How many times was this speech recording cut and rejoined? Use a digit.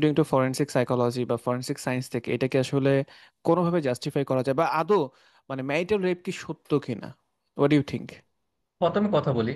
0